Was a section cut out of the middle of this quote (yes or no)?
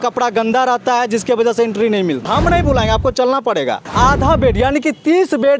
yes